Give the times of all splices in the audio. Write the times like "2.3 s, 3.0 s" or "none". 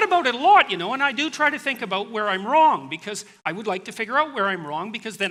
none